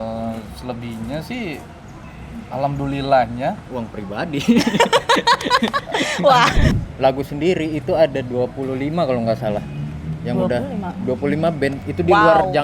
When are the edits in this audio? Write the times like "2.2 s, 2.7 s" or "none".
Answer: 6.7 s